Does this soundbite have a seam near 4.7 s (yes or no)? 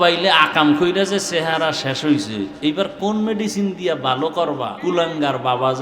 yes